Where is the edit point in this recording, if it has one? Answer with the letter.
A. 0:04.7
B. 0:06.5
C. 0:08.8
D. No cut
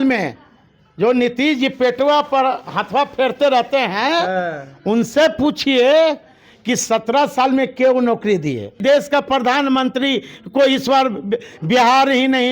C